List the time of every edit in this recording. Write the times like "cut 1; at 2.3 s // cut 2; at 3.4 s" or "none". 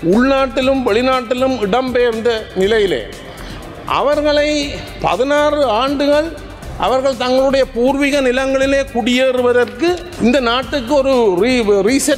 cut 1; at 10.1 s